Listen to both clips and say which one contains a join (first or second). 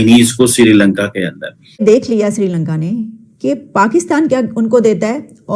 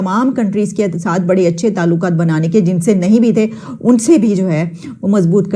first